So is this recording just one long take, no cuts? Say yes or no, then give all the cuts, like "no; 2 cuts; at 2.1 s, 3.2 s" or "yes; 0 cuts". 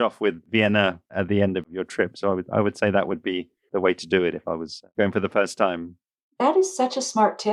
yes; 0 cuts